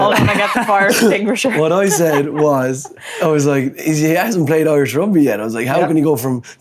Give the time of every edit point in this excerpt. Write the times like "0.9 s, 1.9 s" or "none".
none